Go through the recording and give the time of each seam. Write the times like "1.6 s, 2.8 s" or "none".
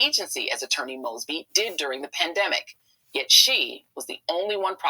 2.7 s